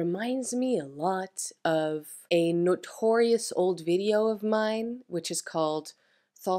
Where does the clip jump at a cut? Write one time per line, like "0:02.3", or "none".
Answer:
0:02.1